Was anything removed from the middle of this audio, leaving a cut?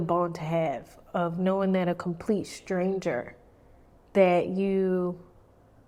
no; 0 cuts

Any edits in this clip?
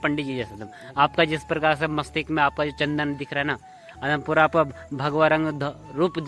no; 0 cuts

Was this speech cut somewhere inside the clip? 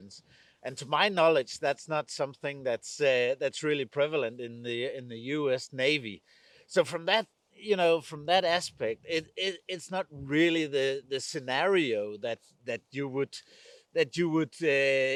no; 0 cuts

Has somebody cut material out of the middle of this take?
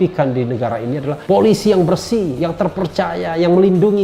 yes; 1 cut; at 1.1 s

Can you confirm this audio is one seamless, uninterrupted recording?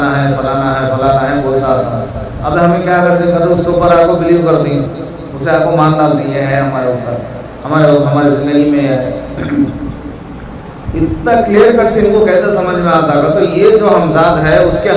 yes; 0 cuts

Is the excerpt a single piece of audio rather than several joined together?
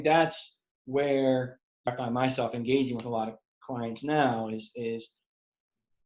no; 1 cut; at 1.8 s

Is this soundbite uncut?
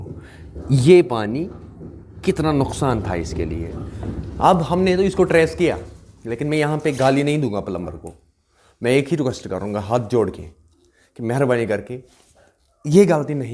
yes; 0 cuts

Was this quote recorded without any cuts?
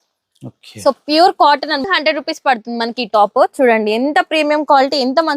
no; 1 cut; at 1.8 s

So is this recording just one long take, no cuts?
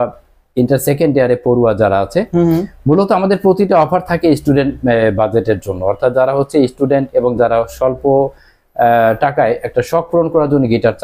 yes; 0 cuts

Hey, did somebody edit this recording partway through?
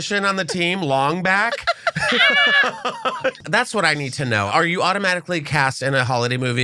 yes; 2 cuts; at 3.4 s, 4.5 s

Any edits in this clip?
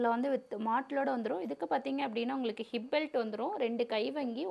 no; 0 cuts

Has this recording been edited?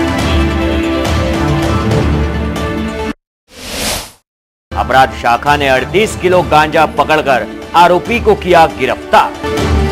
no; 0 cuts

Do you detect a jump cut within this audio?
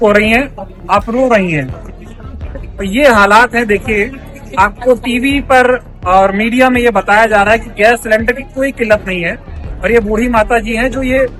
no; 0 cuts

